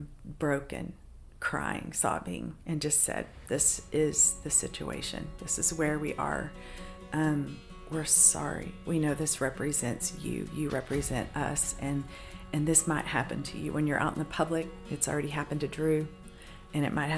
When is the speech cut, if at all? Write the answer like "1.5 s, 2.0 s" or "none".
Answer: none